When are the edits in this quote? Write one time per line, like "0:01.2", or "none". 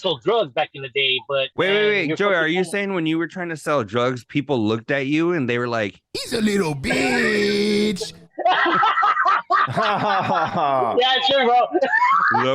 0:01.5